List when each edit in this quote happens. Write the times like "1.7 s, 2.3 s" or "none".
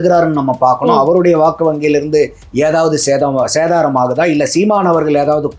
2.4 s